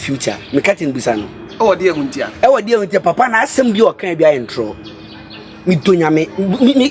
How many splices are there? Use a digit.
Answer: 0